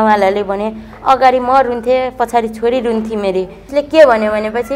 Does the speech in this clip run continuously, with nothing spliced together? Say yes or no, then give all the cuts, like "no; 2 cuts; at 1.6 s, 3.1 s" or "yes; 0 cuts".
no; 1 cut; at 3.6 s